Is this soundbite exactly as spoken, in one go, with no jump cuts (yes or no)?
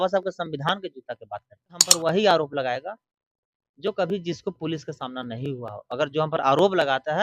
no